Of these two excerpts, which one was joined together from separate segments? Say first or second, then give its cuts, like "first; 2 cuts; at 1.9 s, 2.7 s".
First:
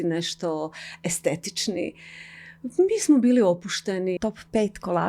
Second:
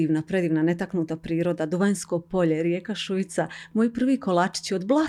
first; 1 cut; at 4.2 s